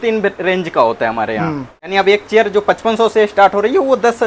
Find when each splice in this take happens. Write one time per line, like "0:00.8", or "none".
0:01.8